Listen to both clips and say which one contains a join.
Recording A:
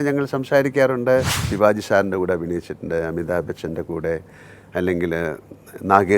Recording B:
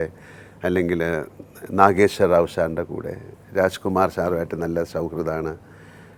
A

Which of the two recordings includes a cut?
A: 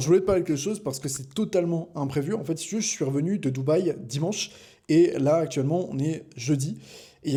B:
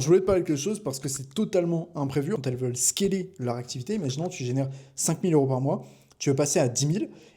B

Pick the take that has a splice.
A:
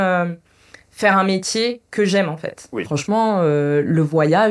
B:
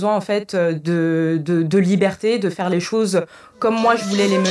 A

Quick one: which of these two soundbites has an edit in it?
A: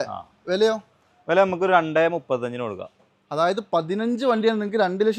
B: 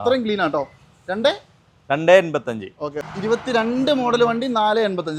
B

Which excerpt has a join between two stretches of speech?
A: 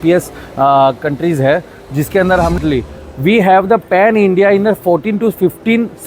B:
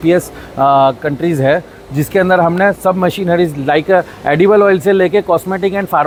A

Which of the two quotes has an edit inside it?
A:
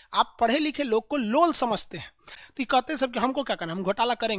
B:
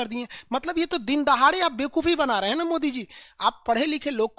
A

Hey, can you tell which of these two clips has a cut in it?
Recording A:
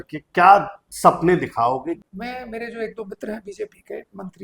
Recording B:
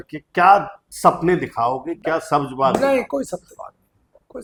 A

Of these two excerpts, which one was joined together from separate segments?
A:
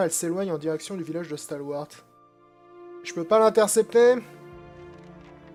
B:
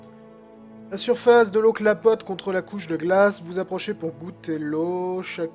B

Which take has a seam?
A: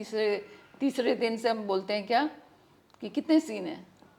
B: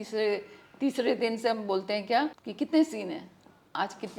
B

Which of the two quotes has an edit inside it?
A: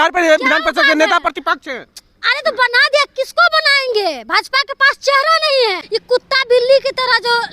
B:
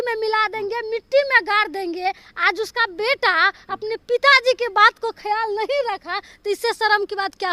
A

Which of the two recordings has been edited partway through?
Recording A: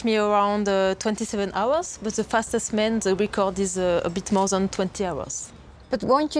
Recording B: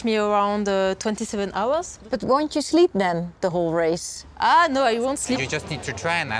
B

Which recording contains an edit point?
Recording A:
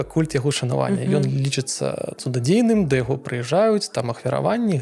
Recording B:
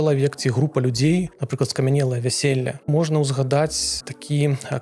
B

